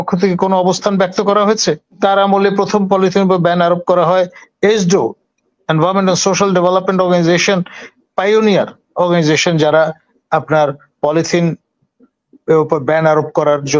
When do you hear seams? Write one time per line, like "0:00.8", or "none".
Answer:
0:02.0